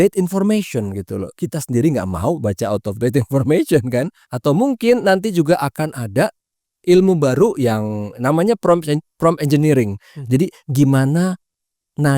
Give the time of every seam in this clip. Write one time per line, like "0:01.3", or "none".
0:04.3